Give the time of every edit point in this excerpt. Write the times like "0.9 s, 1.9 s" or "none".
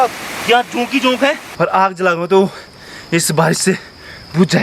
1.4 s

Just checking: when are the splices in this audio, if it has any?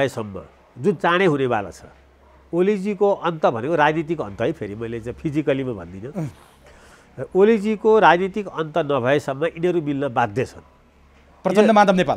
none

